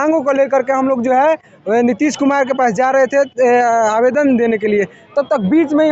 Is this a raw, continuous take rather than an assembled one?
yes; 0 cuts

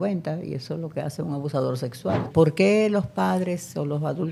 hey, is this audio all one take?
no; 1 cut; at 2.3 s

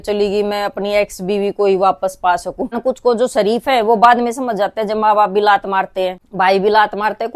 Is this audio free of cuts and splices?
no; 2 cuts; at 2.8 s, 6.2 s

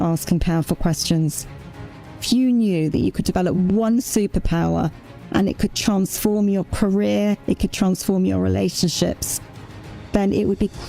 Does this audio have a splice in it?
yes; 1 cut; at 1.9 s

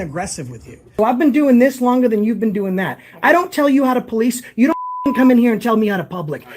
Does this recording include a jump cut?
yes; 1 cut; at 1.0 s

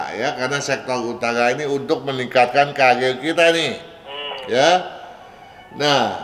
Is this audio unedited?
yes; 0 cuts

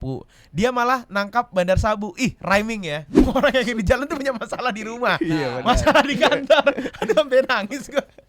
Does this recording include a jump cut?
yes; 1 cut; at 3.3 s

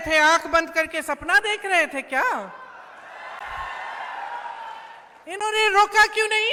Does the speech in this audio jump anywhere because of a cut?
no; 0 cuts

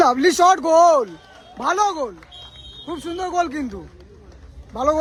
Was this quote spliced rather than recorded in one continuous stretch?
no; 0 cuts

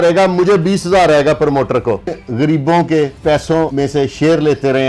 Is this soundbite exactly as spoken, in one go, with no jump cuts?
no; 2 cuts; at 2.2 s, 3.5 s

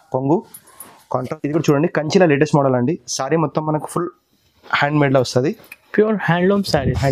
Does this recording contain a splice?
yes; 1 cut; at 1.3 s

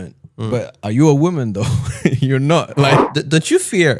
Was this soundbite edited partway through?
yes; 1 cut; at 3.0 s

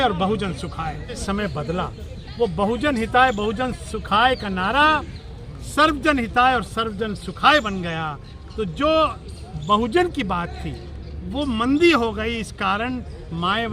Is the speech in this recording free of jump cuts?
no; 1 cut; at 1.2 s

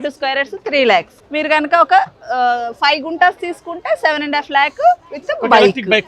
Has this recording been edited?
no; 0 cuts

